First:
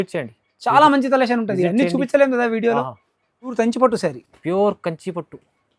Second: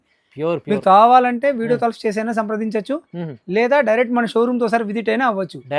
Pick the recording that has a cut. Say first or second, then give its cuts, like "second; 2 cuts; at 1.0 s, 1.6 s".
first; 1 cut; at 3.5 s